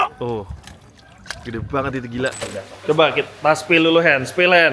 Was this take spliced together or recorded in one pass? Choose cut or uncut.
cut